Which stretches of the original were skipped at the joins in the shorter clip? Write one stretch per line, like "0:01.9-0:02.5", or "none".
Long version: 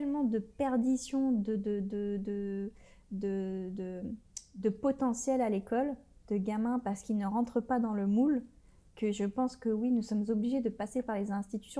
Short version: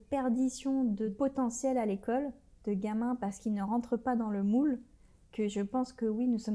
0:01.6-0:04.8